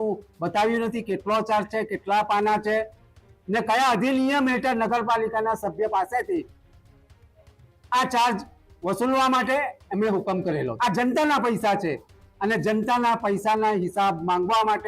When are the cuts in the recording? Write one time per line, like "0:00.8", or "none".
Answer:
0:10.7